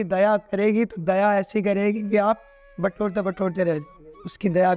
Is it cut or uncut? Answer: uncut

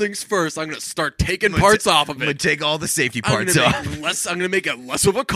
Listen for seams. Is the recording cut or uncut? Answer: uncut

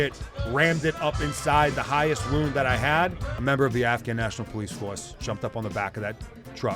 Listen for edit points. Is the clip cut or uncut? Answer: cut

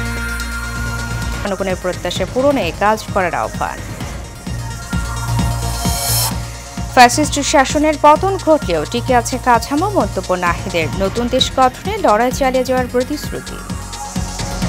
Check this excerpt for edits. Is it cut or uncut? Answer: cut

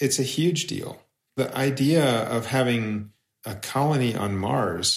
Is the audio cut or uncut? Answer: cut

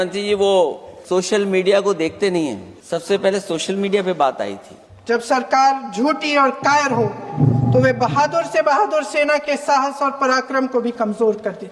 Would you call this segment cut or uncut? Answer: cut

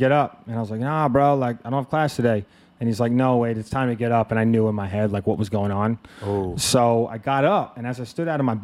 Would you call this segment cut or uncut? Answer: uncut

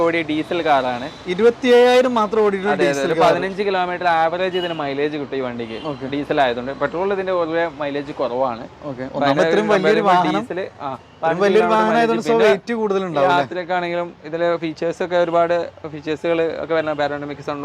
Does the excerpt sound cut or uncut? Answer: uncut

